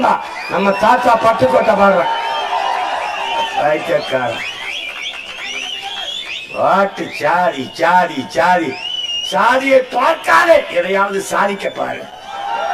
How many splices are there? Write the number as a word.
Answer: zero